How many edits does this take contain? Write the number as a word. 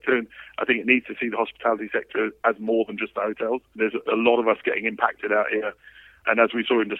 two